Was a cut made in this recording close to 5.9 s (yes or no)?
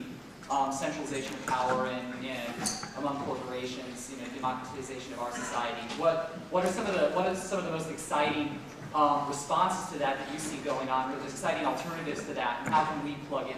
no